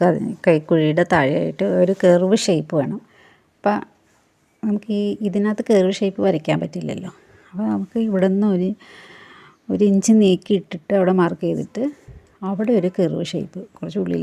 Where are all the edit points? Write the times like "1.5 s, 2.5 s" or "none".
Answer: none